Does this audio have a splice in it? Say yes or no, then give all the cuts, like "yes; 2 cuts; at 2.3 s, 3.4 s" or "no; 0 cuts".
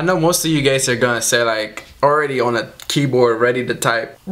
no; 0 cuts